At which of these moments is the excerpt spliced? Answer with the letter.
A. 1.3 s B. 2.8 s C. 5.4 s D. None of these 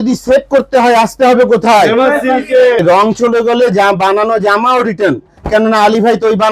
B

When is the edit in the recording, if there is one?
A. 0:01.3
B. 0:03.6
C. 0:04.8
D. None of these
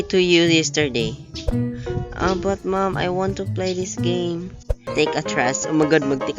C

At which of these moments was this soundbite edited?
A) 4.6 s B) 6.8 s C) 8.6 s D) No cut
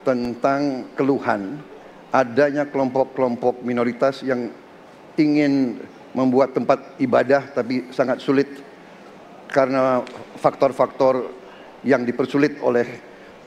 D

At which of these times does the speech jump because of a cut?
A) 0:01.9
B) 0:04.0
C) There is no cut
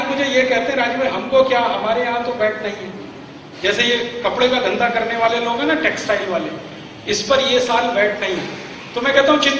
A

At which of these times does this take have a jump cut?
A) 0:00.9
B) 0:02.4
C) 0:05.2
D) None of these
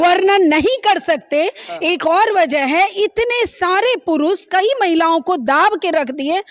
D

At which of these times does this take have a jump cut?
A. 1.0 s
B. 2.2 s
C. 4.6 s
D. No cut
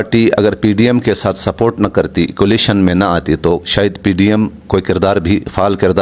D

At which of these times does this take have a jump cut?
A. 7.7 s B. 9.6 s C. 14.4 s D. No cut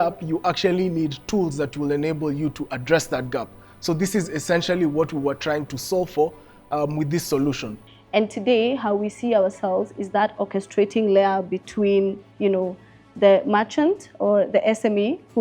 A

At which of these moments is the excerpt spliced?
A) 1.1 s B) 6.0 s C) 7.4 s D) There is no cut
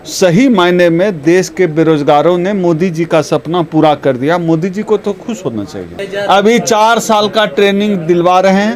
B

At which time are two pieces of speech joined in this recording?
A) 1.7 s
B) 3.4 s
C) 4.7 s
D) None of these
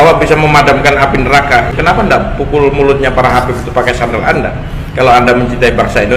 A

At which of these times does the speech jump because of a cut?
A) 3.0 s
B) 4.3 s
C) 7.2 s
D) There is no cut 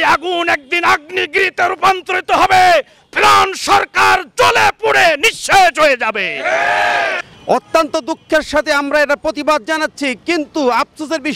C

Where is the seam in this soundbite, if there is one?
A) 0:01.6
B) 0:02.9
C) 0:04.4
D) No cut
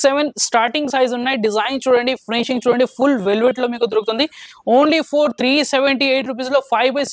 C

